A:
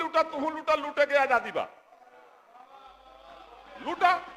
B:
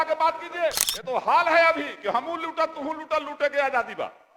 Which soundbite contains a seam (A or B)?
B